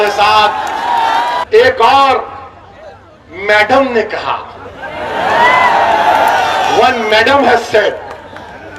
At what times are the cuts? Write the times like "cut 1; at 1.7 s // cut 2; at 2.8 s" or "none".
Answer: cut 1; at 1.4 s